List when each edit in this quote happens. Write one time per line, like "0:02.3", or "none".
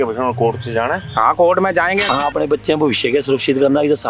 0:02.1